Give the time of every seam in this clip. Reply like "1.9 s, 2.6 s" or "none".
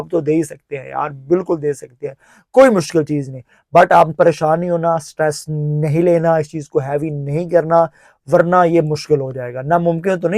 none

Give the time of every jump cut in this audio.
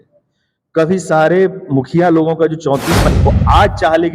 3.0 s

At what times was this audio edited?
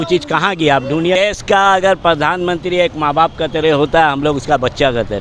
1.2 s

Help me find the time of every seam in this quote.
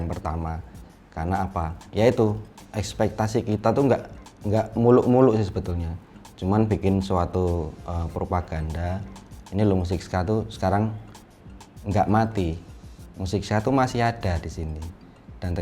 1.8 s

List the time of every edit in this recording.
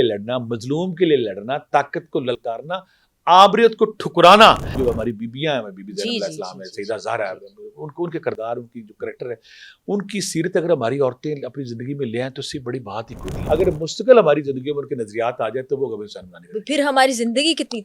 4.7 s, 13.3 s

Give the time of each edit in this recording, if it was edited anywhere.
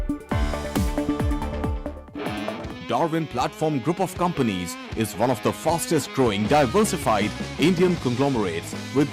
2.2 s

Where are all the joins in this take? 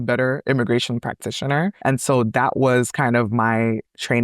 1.8 s

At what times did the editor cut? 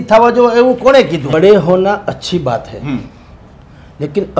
1.4 s

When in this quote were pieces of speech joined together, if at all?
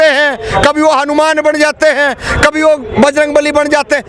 none

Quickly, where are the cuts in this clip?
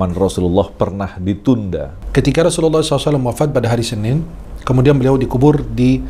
1.9 s

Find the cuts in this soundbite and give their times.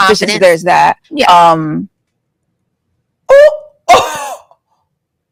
none

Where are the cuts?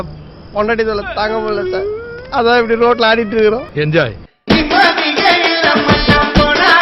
none

